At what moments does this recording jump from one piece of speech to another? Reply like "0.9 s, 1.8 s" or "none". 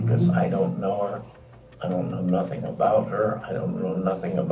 none